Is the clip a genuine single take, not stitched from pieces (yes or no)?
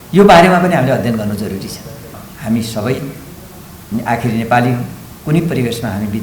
no